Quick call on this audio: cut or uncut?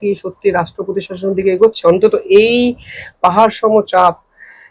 uncut